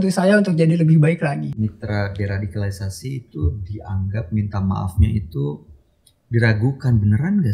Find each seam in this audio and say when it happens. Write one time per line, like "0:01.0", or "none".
0:01.5